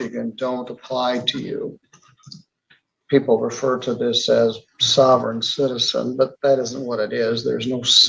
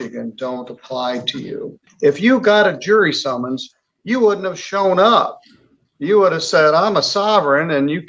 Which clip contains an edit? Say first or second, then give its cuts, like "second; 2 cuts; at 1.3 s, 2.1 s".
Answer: second; 1 cut; at 1.8 s